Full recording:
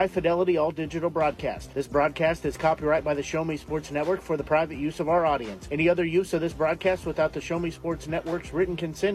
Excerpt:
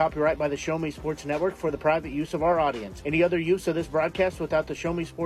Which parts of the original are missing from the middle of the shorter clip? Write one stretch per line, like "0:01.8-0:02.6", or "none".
none